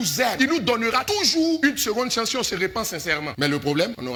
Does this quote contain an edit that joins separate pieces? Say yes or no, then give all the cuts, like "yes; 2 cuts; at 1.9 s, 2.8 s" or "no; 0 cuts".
no; 0 cuts